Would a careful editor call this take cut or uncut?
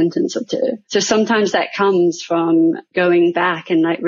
cut